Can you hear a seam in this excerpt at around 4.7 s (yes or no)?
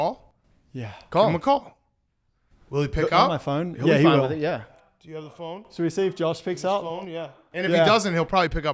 yes